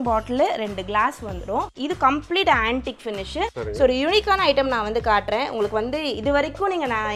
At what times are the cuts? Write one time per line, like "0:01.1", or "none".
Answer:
0:01.7
0:03.5